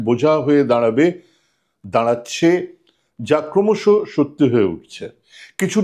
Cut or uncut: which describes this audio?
uncut